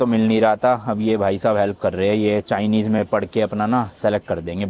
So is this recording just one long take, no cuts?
yes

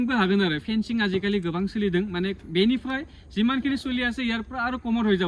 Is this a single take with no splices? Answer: yes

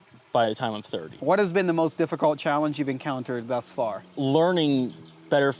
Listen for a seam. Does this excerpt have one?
yes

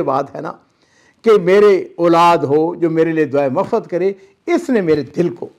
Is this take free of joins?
yes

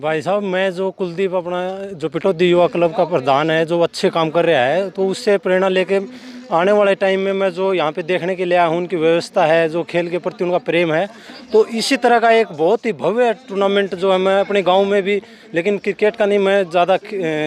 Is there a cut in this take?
no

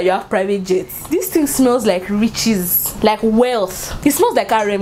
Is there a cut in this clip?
yes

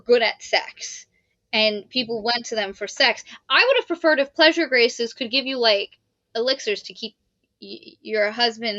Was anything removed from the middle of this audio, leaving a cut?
no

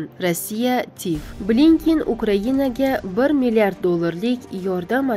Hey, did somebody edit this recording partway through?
yes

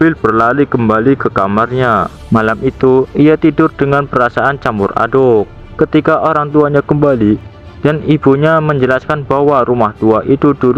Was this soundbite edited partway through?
yes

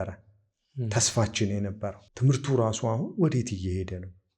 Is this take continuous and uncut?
no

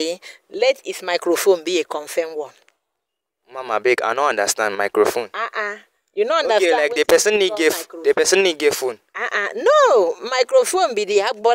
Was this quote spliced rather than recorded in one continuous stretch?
no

